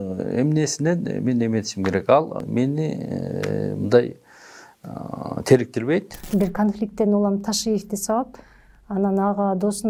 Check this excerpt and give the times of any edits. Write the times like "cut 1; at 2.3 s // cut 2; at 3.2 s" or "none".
cut 1; at 2.4 s // cut 2; at 6.2 s